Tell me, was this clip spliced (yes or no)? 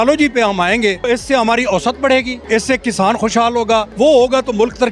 yes